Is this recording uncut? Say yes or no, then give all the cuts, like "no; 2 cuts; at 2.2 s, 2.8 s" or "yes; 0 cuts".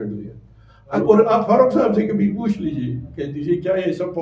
no; 1 cut; at 0.9 s